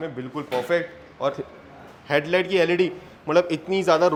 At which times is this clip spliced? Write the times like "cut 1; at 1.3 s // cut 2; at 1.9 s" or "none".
none